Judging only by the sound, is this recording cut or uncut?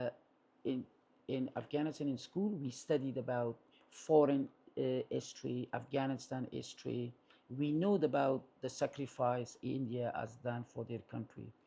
uncut